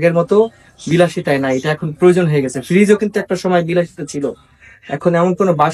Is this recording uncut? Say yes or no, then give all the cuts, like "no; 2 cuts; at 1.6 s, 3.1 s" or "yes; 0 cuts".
yes; 0 cuts